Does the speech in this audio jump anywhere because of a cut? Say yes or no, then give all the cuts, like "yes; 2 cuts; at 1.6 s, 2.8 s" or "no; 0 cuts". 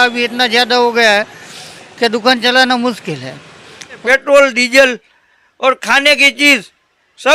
yes; 1 cut; at 4.0 s